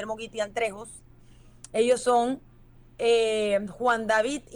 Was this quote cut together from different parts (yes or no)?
no